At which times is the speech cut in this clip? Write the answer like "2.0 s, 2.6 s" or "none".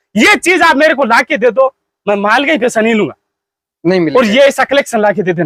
none